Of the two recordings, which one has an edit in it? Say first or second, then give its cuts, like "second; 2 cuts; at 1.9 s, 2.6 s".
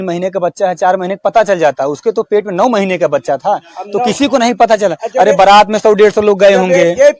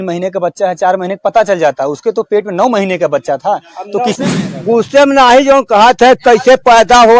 second; 1 cut; at 4.2 s